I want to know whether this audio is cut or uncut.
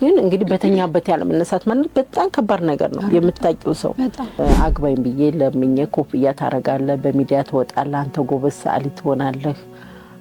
cut